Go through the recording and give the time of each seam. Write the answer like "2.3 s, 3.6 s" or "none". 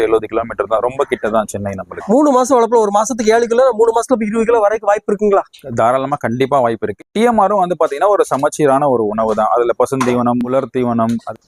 1.9 s, 7.0 s, 10.5 s